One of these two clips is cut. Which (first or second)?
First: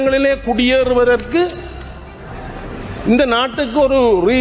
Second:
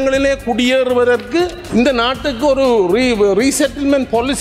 second